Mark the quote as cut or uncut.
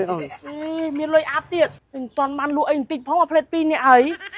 cut